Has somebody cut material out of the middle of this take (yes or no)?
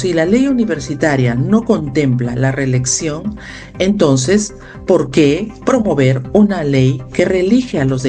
no